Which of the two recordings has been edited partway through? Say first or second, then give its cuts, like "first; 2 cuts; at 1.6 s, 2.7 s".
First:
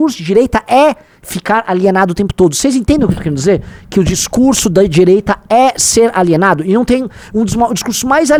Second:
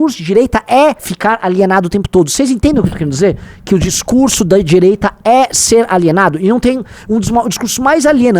second; 1 cut; at 1.1 s